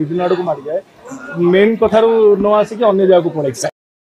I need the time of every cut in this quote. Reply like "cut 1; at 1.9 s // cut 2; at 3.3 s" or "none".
none